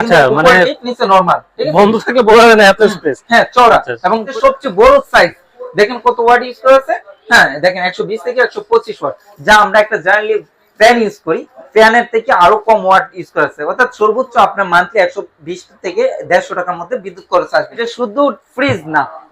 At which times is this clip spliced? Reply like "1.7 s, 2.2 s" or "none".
4.3 s, 17.9 s